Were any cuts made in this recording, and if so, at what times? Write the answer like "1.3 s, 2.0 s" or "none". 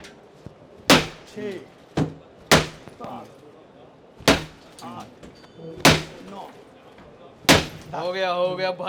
none